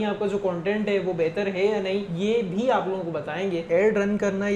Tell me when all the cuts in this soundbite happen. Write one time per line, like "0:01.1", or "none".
0:02.1
0:03.6

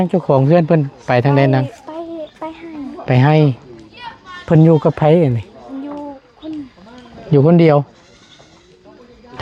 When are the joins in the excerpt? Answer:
none

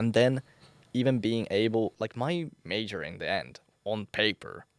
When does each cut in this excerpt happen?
0:01.9

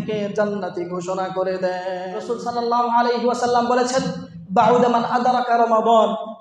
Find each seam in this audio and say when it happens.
0:02.2

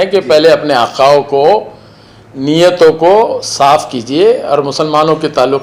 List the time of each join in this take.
none

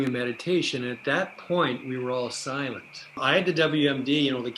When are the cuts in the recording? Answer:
0:03.2

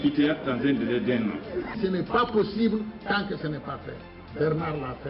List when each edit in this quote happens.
0:01.8

